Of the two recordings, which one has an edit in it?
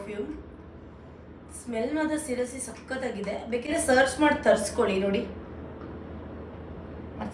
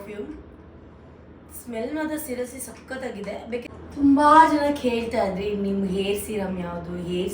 second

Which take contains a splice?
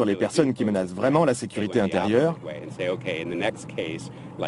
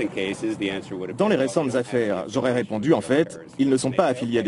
second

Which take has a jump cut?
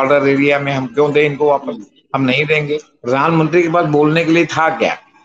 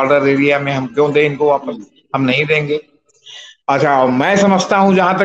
first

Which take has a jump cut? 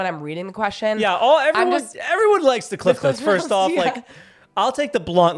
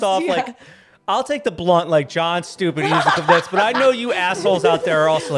first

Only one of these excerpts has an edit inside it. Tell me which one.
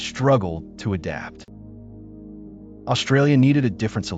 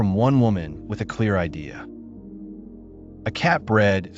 second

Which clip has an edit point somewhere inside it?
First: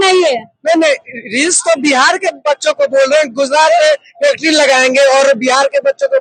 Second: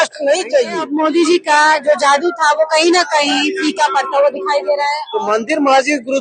second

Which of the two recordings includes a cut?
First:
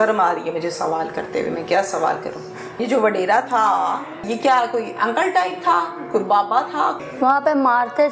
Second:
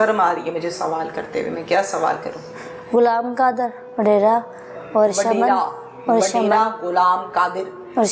first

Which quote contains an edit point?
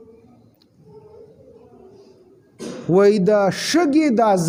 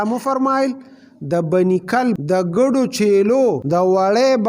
second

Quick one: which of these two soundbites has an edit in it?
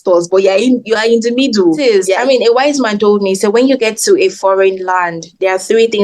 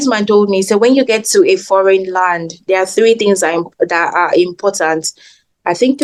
first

